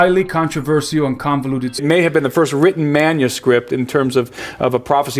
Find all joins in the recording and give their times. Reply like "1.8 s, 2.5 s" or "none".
none